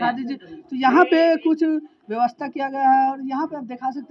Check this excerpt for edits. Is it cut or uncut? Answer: uncut